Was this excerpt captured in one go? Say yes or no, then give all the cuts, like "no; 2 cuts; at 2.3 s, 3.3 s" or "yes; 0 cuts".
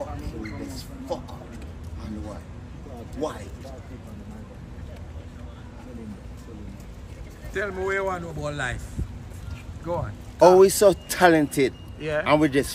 yes; 0 cuts